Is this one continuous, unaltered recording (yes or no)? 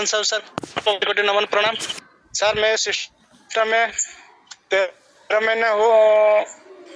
yes